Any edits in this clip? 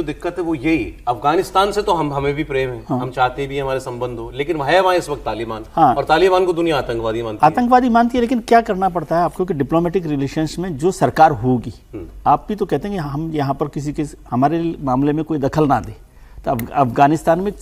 no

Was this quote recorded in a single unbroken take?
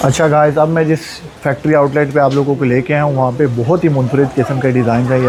yes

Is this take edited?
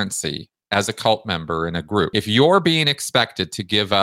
yes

